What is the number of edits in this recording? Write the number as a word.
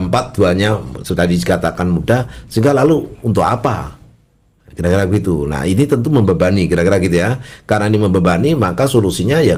zero